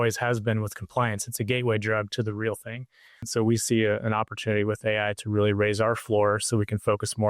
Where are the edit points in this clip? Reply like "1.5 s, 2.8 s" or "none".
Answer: 3.2 s